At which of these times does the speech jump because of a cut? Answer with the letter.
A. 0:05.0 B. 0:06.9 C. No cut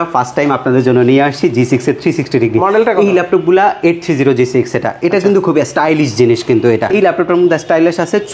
B